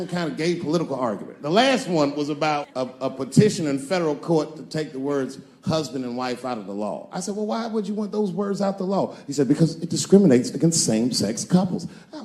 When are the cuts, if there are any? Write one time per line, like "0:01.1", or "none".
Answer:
0:02.8